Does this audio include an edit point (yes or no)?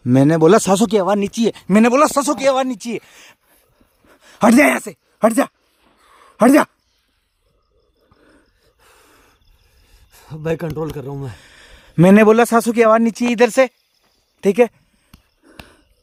no